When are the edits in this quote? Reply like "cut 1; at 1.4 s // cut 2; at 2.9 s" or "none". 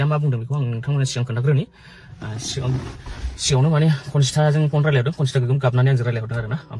none